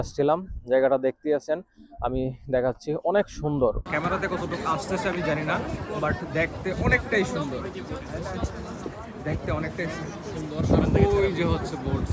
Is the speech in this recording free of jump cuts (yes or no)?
no